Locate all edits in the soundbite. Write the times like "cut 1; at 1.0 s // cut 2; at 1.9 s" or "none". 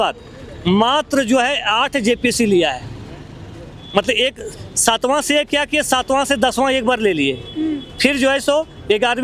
none